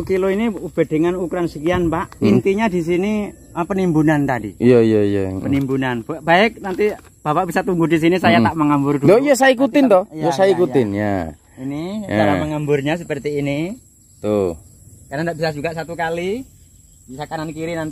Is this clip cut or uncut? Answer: uncut